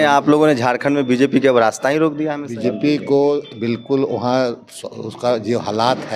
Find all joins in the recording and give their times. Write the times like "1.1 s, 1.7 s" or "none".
2.4 s